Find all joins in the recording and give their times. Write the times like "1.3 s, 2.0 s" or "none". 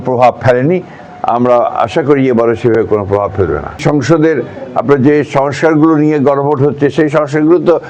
3.8 s